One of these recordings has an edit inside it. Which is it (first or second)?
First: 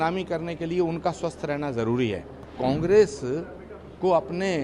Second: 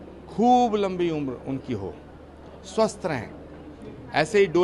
first